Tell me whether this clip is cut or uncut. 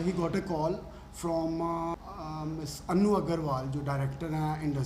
cut